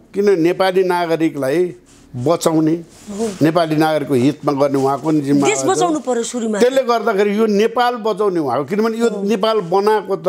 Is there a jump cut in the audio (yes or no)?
no